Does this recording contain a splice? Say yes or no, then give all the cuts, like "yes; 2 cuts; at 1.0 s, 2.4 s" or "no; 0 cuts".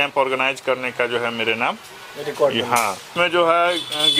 yes; 1 cut; at 3.1 s